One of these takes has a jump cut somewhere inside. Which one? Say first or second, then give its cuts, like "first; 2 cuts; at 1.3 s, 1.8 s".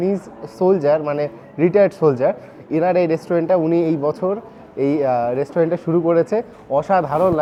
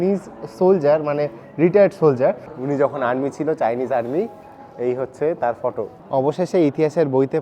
second; 2 cuts; at 2.5 s, 6.0 s